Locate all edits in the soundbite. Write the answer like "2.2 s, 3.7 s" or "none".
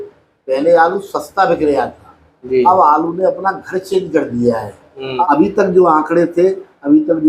5.2 s